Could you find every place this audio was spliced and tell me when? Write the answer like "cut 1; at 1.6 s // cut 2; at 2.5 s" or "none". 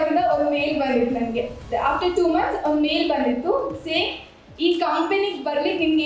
cut 1; at 1.6 s